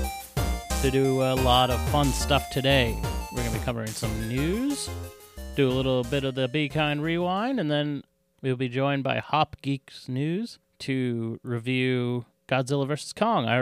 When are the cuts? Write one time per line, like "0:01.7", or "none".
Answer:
0:10.7
0:12.3